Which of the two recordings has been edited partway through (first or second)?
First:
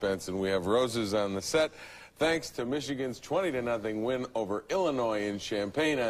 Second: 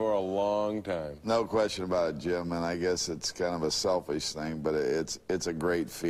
first